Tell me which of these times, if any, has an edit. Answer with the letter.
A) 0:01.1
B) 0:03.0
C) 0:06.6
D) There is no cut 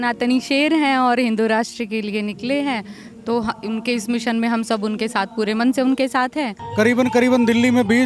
C